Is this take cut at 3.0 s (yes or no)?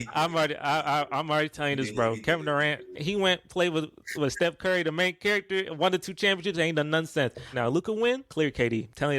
yes